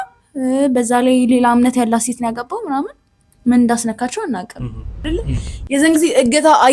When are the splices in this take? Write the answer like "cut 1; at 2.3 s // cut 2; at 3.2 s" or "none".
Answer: cut 1; at 5.0 s

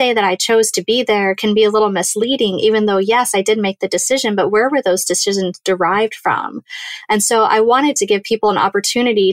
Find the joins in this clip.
none

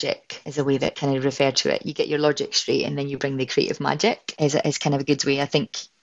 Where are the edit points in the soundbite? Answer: cut 1; at 0.7 s // cut 2; at 4.3 s

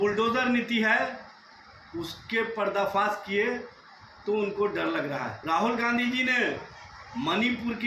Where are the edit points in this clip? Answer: cut 1; at 5.3 s

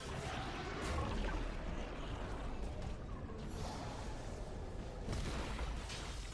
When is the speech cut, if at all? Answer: cut 1; at 1.1 s // cut 2; at 2.4 s

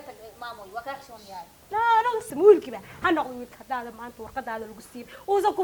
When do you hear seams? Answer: cut 1; at 2.3 s

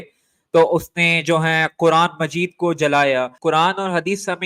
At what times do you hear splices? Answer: cut 1; at 3.3 s

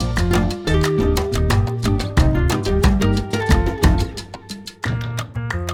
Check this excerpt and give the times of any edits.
none

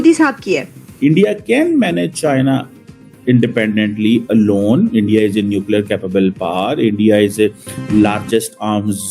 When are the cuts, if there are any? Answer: cut 1; at 1.2 s

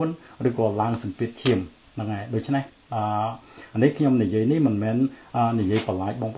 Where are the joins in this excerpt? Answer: none

